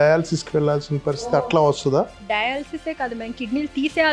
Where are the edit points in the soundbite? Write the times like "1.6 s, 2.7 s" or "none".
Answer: 2.2 s